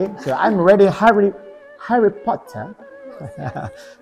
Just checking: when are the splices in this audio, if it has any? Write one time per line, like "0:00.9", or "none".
none